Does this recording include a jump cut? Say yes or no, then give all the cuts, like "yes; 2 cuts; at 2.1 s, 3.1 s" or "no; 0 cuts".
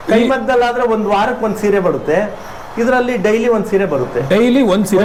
no; 0 cuts